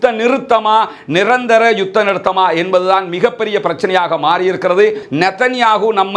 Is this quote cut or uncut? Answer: cut